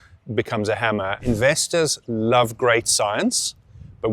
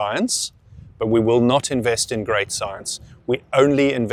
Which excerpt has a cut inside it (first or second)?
first